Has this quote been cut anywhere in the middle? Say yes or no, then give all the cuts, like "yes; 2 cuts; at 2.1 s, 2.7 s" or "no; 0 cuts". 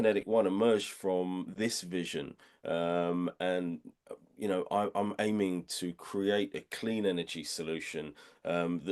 no; 0 cuts